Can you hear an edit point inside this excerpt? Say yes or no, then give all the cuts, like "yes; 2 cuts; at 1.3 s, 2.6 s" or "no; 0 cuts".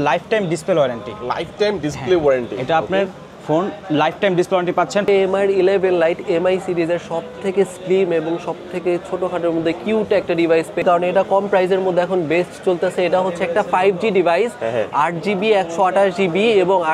yes; 2 cuts; at 5.1 s, 10.8 s